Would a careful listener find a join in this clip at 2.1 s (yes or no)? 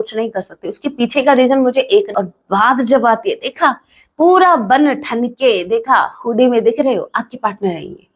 yes